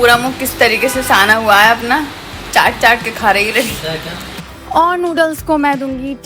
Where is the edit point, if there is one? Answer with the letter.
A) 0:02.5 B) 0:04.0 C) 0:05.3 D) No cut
D